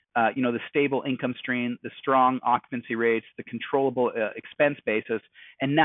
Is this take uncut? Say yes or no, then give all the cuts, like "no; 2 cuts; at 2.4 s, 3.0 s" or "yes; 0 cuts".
yes; 0 cuts